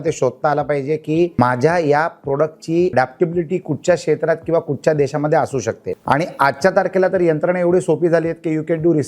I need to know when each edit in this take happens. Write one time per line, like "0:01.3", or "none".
0:01.4
0:02.9
0:05.9